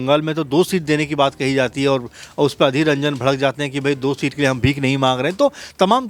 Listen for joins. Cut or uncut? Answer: uncut